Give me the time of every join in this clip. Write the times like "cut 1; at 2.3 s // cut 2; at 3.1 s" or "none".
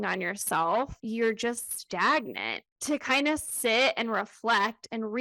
cut 1; at 1.0 s // cut 2; at 2.7 s